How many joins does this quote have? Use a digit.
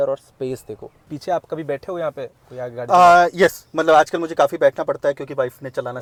0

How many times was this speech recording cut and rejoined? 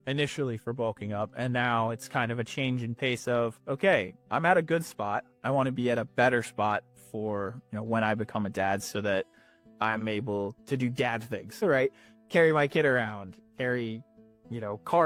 0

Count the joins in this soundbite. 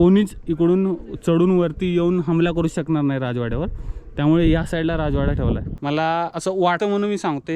2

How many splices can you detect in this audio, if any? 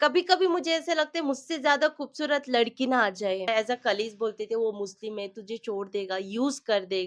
1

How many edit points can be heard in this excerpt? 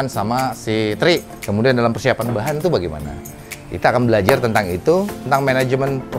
2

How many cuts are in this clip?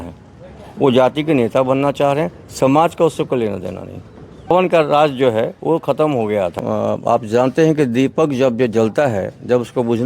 2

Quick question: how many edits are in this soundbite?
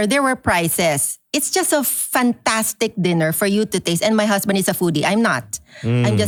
0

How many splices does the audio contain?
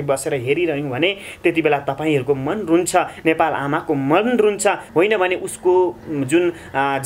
1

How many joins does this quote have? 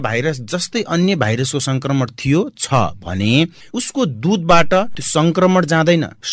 1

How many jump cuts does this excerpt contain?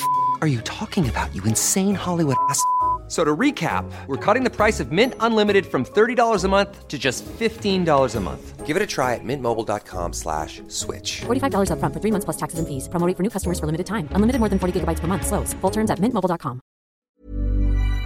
1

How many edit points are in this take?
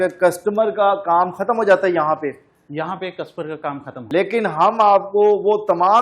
1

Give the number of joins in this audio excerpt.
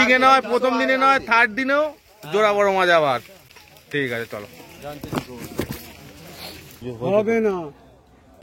0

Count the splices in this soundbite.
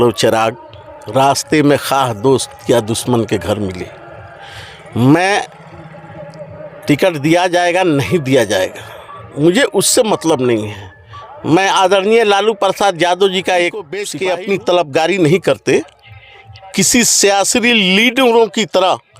1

